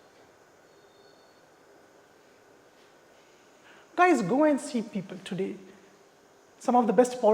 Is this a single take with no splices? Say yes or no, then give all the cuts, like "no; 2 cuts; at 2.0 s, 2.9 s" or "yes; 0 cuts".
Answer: no; 1 cut; at 3.1 s